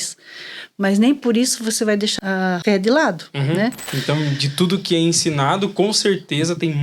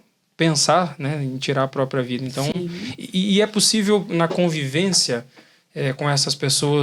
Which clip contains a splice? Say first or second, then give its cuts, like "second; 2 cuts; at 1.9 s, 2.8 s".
first; 2 cuts; at 2.1 s, 3.9 s